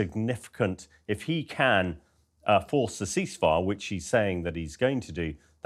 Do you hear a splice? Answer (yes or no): no